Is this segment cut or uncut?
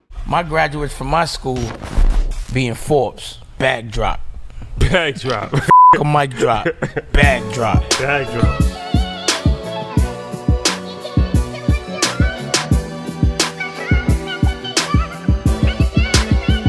uncut